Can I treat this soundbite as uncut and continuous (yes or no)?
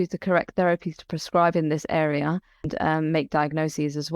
no